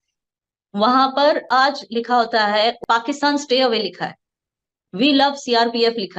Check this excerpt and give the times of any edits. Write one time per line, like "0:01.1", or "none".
0:02.8